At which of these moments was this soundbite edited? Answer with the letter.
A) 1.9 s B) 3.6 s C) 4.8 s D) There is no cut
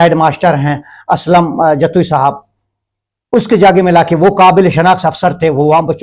D